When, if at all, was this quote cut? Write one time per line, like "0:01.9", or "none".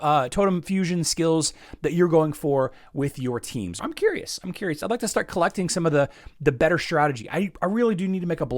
0:03.8